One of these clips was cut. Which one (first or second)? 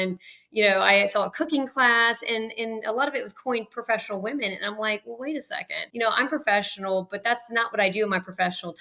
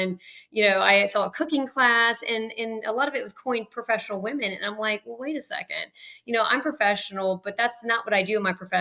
first